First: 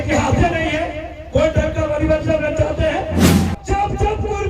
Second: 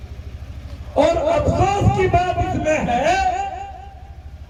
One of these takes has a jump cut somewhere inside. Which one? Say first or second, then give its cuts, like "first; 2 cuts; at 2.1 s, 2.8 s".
first; 1 cut; at 3.3 s